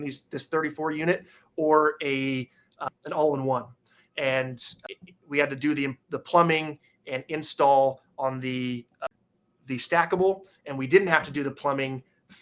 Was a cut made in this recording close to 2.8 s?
yes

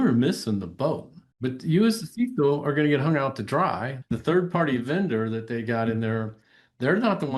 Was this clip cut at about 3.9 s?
yes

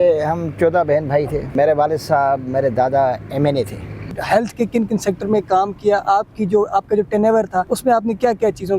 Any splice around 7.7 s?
yes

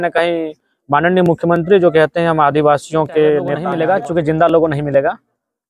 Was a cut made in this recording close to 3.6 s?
yes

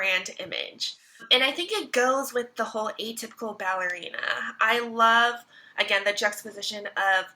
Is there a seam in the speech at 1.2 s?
yes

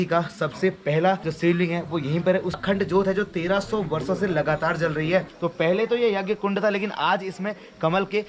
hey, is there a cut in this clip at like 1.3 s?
yes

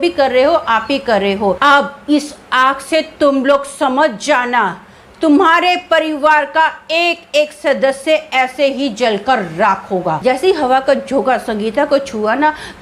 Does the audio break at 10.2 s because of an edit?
yes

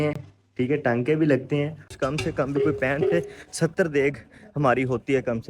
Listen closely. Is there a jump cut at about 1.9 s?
yes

